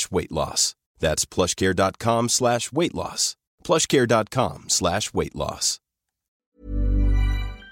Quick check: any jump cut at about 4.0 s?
no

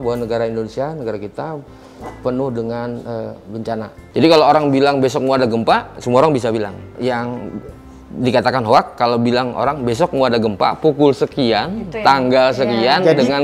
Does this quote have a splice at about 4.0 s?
yes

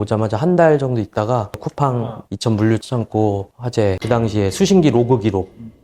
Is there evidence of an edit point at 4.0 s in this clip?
yes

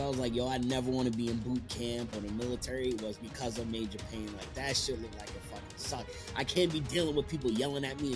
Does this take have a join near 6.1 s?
no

